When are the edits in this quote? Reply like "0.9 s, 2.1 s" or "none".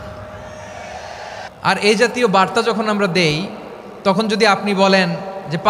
1.4 s